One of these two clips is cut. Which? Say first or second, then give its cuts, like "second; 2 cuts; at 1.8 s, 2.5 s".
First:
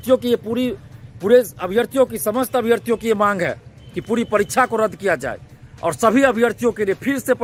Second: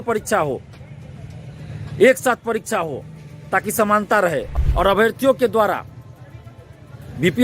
second; 1 cut; at 4.5 s